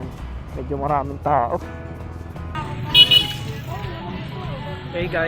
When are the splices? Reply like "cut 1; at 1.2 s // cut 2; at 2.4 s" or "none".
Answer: cut 1; at 2.6 s